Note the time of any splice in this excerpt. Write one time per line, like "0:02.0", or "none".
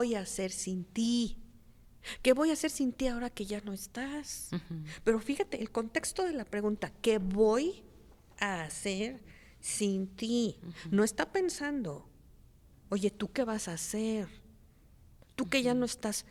none